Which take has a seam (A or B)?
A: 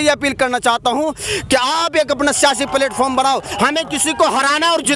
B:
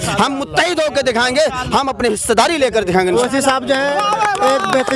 B